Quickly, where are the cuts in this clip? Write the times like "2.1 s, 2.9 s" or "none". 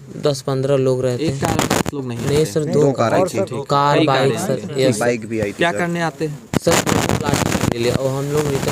none